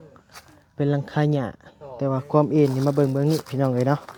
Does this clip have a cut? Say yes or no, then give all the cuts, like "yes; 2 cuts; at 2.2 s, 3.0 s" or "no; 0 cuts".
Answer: no; 0 cuts